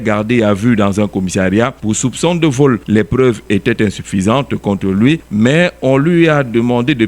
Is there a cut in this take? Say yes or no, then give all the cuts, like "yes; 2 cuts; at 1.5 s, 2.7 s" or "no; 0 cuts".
yes; 3 cuts; at 1.8 s, 2.8 s, 5.3 s